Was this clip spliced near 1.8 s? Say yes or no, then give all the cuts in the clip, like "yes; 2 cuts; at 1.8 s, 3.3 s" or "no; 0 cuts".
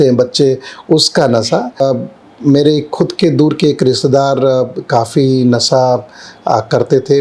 yes; 1 cut; at 1.8 s